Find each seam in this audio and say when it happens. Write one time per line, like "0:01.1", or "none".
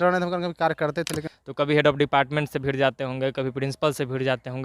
0:01.2